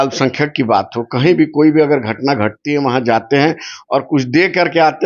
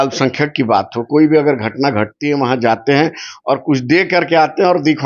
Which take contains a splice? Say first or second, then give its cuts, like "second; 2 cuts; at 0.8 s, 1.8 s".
second; 1 cut; at 1.1 s